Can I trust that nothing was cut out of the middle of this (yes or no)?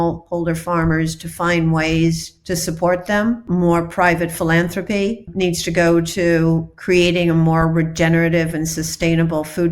no